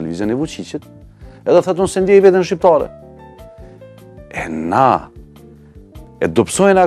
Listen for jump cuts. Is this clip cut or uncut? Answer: uncut